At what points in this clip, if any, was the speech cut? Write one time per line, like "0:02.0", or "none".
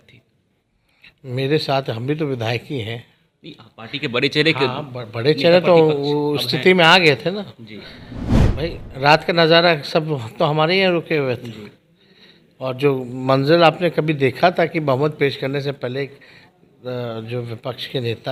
none